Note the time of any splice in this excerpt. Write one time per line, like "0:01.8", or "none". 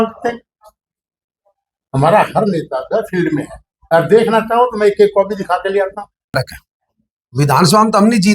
0:06.3